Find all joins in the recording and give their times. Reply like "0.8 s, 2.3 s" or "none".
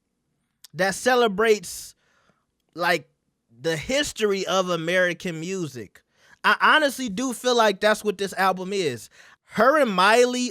9.1 s